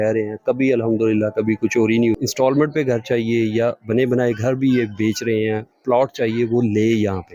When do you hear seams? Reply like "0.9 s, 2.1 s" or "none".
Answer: 2.2 s

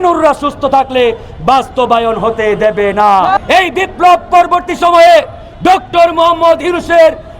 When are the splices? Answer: 3.4 s

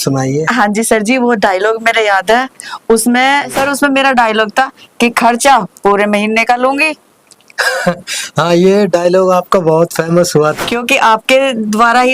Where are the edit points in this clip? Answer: 3.5 s, 10.6 s

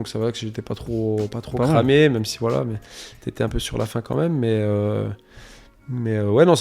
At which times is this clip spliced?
none

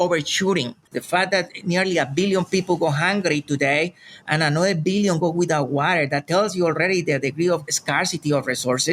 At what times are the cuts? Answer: 0.9 s

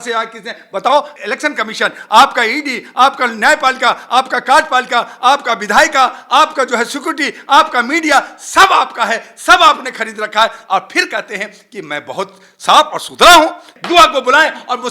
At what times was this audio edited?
1.2 s, 13.7 s

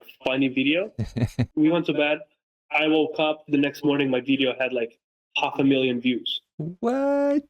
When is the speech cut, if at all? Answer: 1.5 s

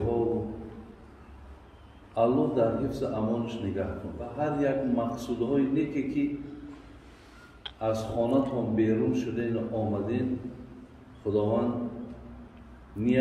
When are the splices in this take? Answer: 4.3 s

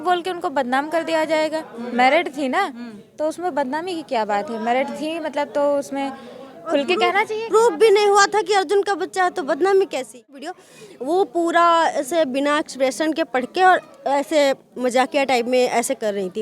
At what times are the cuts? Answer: 10.5 s

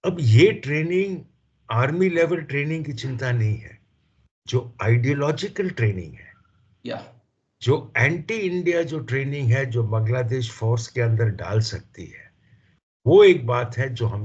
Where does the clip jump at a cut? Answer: none

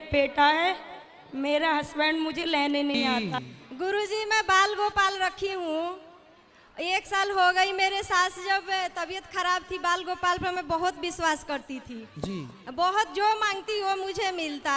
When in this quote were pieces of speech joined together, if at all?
3.4 s

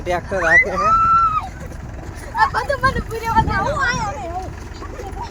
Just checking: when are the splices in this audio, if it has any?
none

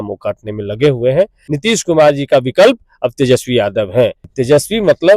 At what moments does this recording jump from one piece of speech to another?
1.4 s, 4.2 s

